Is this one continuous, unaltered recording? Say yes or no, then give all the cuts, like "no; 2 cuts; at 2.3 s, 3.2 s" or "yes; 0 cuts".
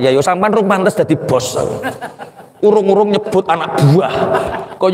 yes; 0 cuts